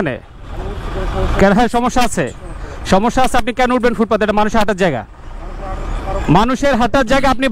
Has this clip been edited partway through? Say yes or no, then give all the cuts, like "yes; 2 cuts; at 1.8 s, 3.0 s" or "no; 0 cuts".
no; 0 cuts